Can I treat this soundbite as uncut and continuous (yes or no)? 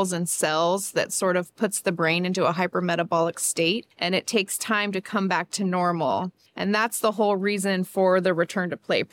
no